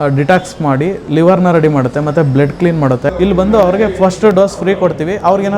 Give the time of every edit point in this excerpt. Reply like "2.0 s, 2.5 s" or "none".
3.1 s